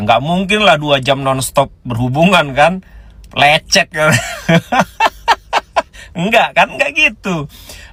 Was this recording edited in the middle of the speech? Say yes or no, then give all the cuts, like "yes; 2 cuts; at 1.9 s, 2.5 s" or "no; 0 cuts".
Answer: no; 0 cuts